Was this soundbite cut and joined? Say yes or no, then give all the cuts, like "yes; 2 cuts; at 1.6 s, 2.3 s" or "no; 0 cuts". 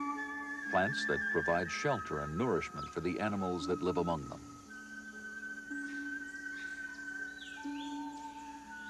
yes; 1 cut; at 6.4 s